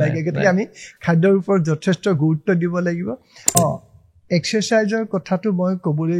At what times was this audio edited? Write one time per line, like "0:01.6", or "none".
0:03.5